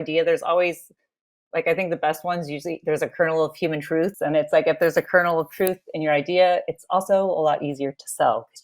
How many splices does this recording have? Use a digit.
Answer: 1